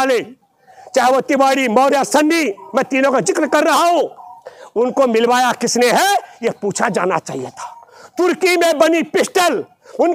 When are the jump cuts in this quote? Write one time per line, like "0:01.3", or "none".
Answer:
none